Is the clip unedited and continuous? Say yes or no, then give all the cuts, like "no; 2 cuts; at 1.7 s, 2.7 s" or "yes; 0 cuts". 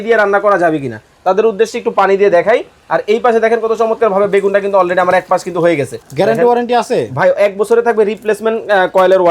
no; 1 cut; at 6.0 s